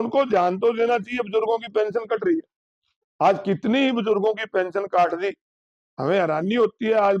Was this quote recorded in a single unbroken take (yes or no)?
yes